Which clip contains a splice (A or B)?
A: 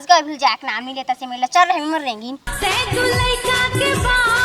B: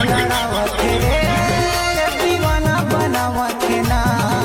A